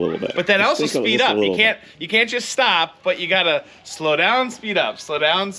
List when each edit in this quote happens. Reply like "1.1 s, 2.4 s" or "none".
none